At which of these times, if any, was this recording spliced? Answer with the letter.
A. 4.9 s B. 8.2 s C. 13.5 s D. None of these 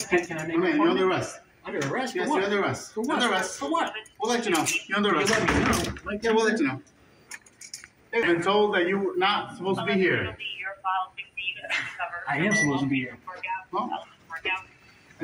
B